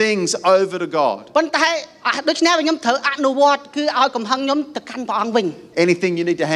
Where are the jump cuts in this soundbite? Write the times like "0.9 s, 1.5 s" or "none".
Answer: none